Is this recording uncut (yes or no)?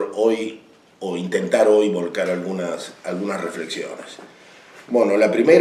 no